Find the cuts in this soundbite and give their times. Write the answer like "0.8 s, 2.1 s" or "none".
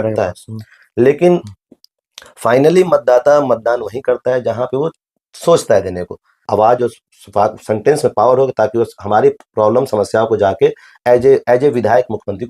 6.4 s